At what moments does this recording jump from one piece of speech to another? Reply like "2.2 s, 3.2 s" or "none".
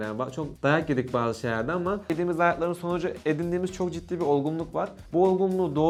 none